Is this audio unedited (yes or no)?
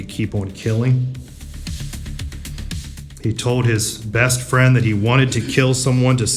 no